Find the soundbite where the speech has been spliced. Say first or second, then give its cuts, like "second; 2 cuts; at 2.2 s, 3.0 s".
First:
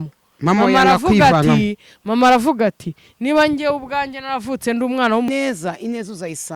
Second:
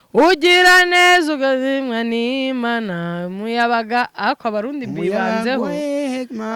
first; 1 cut; at 5.3 s